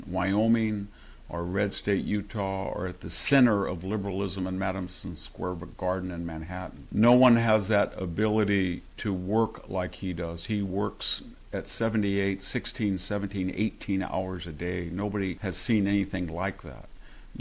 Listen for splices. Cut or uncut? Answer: cut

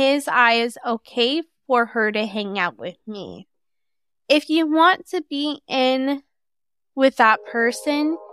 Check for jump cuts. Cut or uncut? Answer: cut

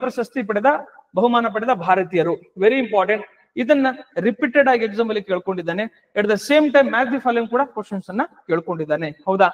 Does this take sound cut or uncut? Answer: uncut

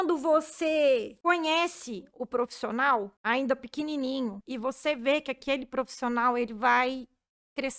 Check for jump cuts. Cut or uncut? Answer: cut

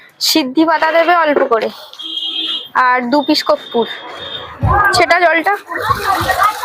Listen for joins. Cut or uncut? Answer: cut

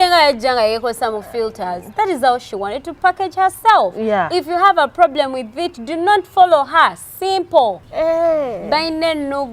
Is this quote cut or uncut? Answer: cut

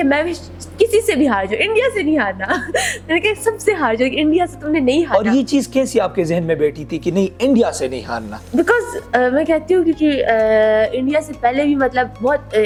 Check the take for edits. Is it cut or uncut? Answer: uncut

